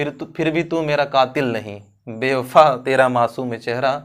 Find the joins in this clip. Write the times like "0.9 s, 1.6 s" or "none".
none